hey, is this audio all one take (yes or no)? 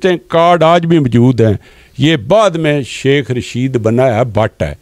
yes